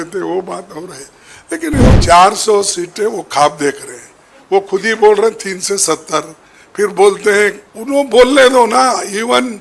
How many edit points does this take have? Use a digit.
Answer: 2